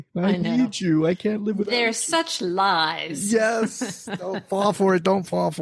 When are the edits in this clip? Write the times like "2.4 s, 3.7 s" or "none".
none